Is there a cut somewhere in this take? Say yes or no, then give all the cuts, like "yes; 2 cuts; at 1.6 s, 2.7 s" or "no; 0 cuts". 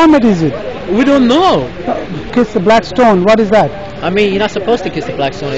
yes; 1 cut; at 2.2 s